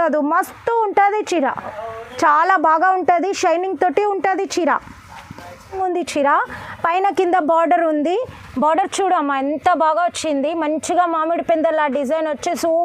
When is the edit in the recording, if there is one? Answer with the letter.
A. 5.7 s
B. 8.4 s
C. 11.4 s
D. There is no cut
A